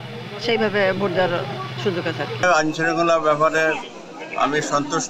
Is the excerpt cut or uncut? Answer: uncut